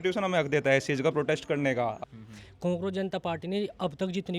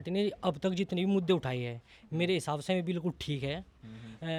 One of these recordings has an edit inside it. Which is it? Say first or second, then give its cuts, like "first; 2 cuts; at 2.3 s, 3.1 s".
first; 1 cut; at 2.0 s